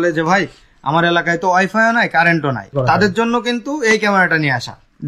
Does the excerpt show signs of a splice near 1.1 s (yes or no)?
no